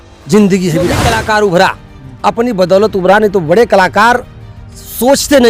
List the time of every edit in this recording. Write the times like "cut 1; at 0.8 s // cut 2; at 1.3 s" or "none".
cut 1; at 1.0 s